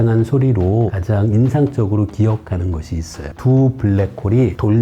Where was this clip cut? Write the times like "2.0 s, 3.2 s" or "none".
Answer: 1.0 s, 3.3 s